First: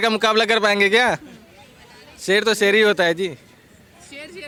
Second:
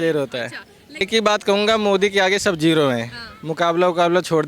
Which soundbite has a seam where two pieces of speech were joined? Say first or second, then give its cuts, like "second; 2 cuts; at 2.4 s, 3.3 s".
second; 1 cut; at 1.0 s